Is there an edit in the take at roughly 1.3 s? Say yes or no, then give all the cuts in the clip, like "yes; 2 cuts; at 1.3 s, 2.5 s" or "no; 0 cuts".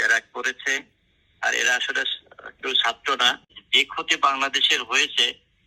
no; 1 cut; at 3.6 s